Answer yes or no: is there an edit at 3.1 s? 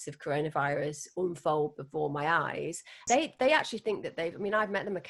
yes